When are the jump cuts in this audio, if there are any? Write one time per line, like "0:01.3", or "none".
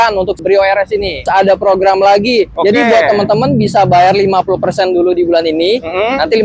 0:01.3
0:02.5